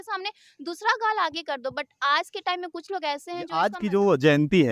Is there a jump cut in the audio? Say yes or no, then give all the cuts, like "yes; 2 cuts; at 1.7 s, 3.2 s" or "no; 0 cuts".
yes; 1 cut; at 3.4 s